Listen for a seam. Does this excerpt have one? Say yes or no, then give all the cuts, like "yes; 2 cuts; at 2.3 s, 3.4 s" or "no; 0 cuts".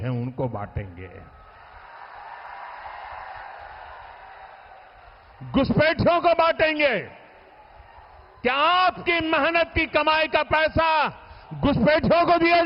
no; 0 cuts